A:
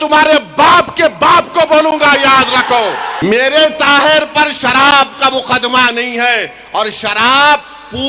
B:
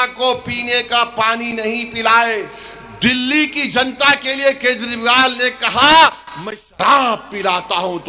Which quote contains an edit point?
A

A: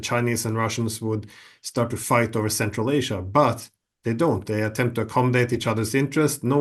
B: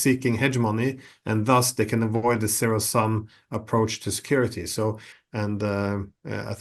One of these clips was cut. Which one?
B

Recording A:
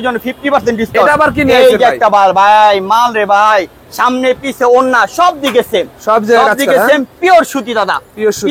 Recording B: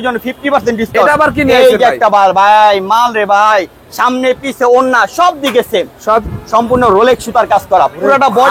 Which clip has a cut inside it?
B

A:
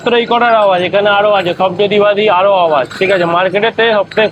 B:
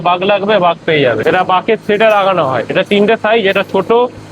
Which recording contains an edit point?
B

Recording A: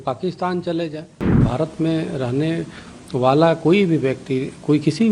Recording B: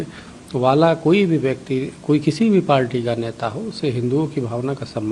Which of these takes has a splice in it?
A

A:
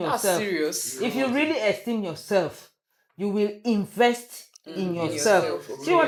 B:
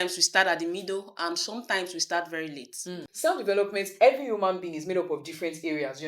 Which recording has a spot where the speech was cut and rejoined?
B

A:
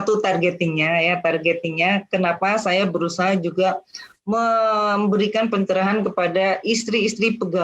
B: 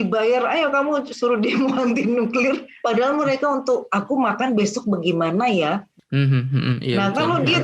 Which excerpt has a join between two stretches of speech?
B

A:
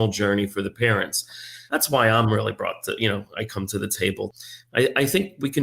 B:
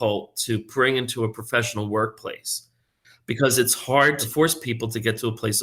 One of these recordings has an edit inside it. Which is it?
A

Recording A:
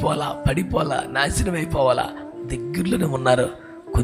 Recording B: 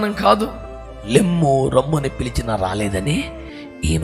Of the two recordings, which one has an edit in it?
B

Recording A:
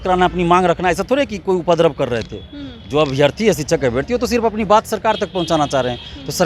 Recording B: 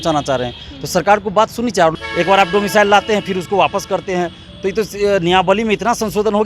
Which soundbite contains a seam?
B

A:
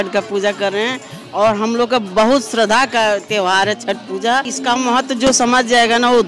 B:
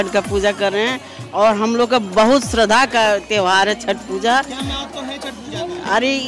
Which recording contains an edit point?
A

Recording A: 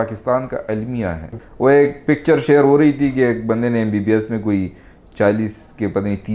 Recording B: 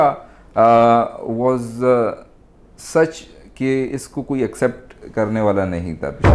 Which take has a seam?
A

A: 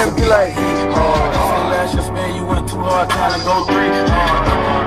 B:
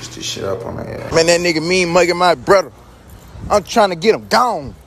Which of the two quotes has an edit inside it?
B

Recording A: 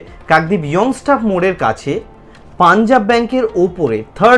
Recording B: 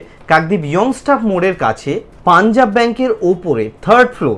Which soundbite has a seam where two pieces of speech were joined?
B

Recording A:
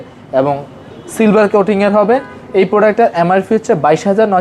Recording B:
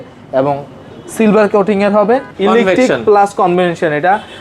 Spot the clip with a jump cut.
B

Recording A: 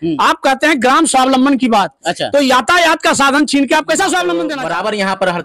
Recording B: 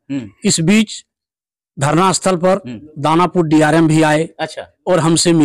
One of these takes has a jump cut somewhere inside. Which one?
A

